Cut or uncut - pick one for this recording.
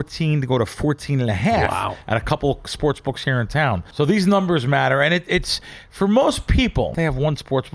cut